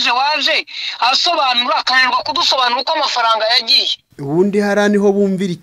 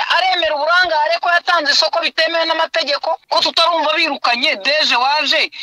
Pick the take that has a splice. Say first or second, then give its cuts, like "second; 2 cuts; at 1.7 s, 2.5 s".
second; 1 cut; at 3.2 s